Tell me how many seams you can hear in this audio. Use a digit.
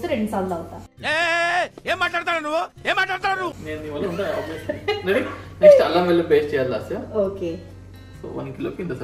0